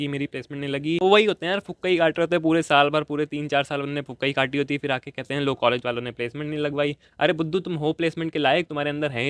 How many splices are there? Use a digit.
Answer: 1